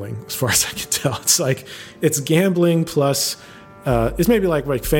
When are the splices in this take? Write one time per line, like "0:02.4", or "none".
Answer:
none